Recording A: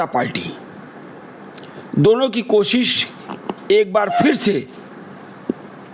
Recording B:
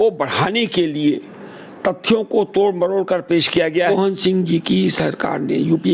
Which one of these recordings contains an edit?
B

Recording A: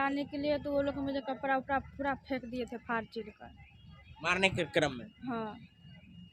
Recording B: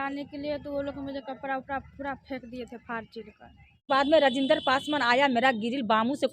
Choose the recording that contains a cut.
B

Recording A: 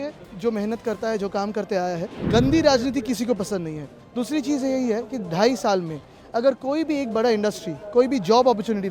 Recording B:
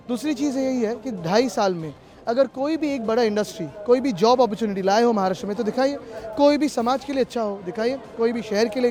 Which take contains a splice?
A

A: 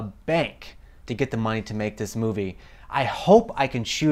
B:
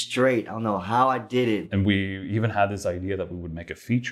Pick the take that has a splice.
B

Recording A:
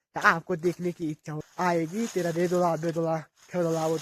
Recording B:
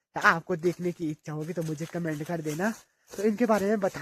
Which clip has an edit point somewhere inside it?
A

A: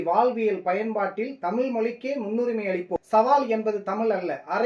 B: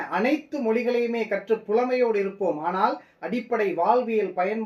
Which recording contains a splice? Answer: A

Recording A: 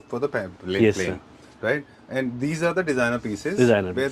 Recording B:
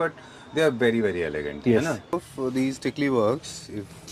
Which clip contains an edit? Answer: B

